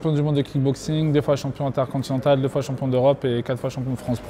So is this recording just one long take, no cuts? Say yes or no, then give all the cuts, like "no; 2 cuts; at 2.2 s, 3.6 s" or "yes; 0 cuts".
yes; 0 cuts